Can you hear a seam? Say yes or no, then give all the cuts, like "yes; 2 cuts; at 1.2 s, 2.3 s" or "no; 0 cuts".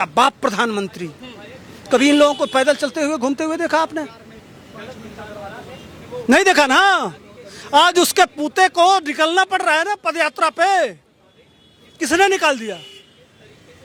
no; 0 cuts